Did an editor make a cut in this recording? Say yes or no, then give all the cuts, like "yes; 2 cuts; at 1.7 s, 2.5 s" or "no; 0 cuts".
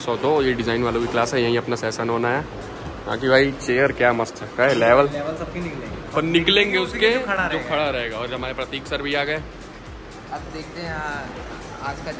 no; 0 cuts